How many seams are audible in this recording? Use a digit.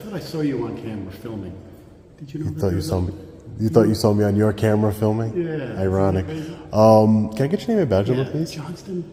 0